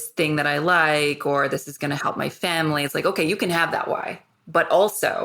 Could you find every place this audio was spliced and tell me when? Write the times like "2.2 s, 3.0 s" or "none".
4.2 s